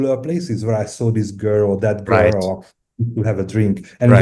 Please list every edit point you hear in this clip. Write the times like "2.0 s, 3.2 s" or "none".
none